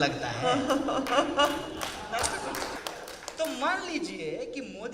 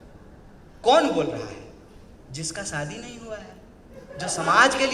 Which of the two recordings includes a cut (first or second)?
first